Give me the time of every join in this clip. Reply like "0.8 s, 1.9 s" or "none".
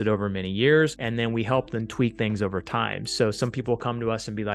1.0 s